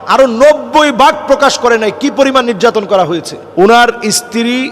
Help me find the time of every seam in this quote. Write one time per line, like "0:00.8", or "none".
0:03.4